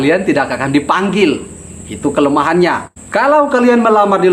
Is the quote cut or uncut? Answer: cut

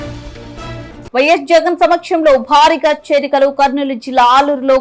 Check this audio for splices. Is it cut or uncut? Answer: cut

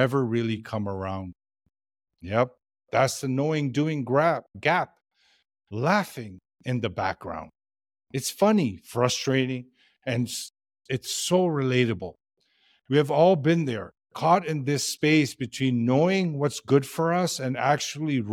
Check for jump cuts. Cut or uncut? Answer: uncut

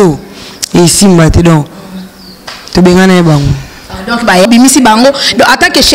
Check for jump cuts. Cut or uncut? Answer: cut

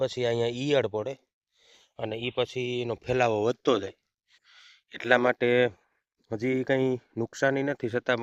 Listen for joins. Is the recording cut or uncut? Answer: uncut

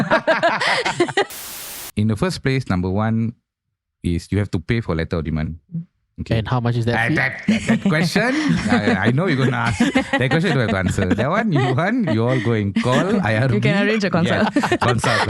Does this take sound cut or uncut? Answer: cut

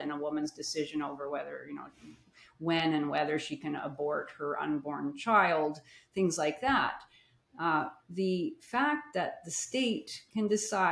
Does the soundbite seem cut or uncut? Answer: uncut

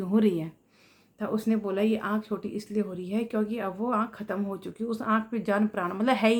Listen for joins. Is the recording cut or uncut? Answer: uncut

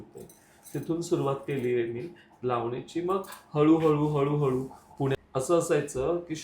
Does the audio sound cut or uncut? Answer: cut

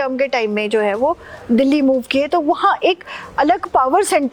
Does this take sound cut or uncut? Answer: uncut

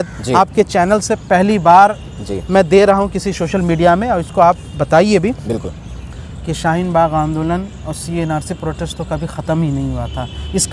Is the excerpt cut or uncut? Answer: uncut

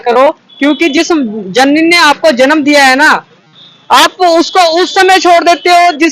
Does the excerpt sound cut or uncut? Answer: uncut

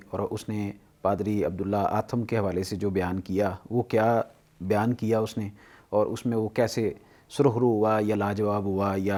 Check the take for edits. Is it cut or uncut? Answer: uncut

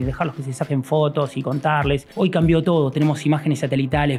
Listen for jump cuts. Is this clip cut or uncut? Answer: cut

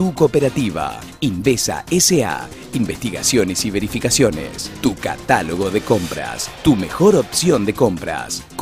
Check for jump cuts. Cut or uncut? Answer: uncut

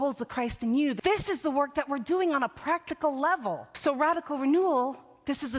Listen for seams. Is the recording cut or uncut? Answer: cut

